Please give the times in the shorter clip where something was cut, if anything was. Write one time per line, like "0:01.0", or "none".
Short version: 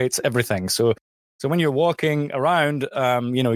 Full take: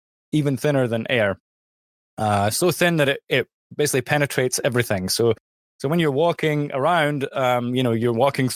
none